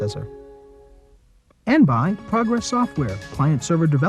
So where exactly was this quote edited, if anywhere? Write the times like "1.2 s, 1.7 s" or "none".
1.6 s